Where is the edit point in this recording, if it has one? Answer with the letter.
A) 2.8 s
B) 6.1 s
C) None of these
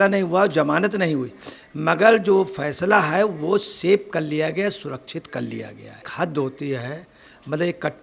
B